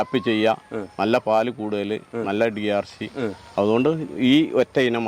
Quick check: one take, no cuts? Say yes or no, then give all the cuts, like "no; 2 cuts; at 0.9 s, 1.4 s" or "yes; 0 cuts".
yes; 0 cuts